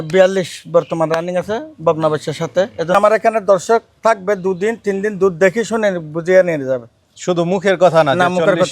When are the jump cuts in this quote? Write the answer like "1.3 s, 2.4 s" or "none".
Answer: 2.9 s